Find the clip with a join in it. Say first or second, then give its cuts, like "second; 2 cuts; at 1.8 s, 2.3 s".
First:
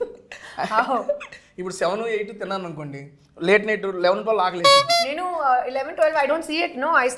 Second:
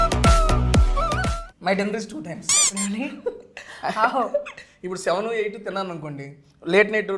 second; 1 cut; at 1.4 s